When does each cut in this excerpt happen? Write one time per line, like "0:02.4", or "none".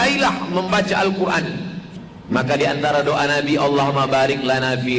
0:01.9